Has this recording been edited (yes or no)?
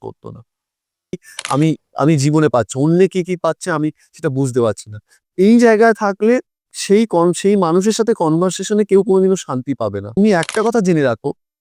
yes